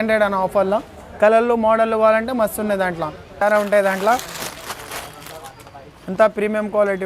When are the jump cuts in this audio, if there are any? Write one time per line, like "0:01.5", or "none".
0:03.4